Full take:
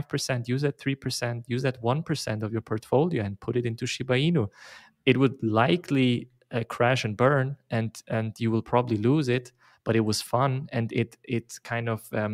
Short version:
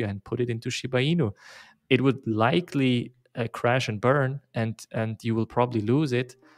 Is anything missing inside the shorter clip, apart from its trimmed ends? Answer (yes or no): no